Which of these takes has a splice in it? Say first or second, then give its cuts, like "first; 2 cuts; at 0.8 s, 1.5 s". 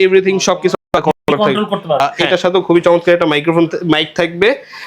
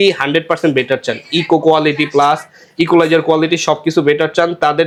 first; 1 cut; at 2.0 s